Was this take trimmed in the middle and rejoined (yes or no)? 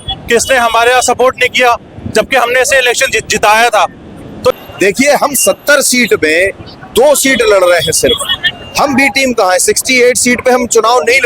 yes